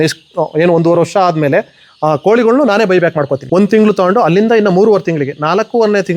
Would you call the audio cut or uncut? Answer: cut